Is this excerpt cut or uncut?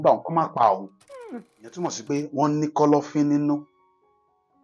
cut